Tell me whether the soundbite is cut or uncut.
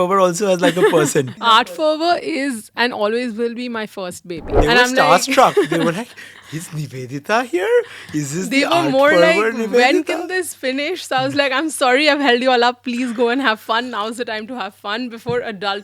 cut